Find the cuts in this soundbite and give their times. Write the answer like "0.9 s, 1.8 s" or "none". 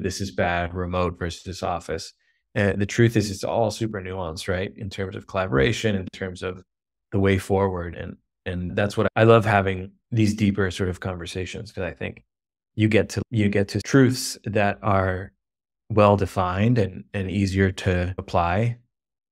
13.8 s, 18.3 s